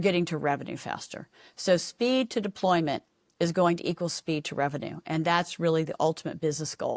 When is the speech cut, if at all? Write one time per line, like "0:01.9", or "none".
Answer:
none